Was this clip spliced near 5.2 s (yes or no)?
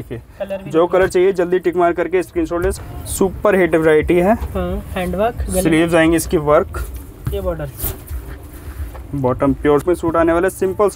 no